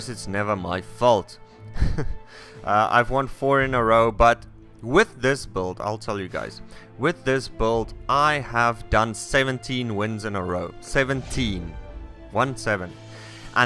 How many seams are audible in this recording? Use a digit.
1